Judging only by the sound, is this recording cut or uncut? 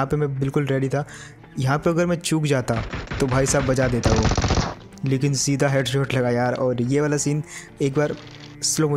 uncut